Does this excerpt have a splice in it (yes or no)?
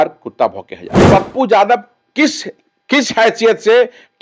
yes